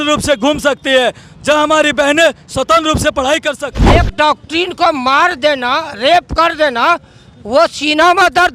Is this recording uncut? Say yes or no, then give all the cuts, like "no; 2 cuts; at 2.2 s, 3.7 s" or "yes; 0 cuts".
no; 1 cut; at 3.7 s